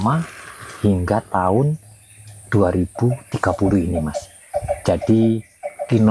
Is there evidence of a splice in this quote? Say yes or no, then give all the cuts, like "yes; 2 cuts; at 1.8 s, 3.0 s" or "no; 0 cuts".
no; 0 cuts